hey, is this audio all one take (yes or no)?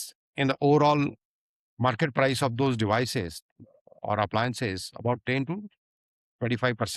yes